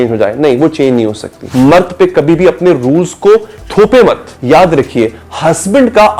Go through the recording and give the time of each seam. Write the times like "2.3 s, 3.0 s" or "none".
1.4 s, 3.6 s, 4.3 s